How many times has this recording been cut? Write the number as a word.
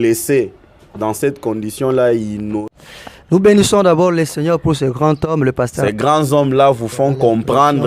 two